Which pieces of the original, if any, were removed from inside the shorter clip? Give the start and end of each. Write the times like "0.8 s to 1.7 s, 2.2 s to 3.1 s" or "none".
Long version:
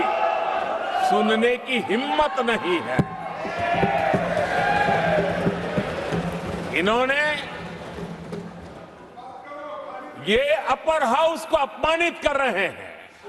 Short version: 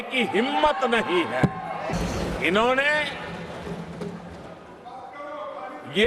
3.5 s to 6.3 s